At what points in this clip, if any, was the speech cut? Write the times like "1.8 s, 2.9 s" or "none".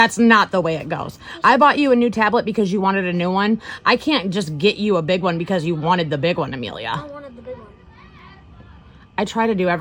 none